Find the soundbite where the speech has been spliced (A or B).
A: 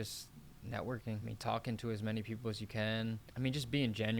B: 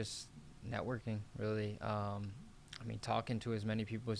A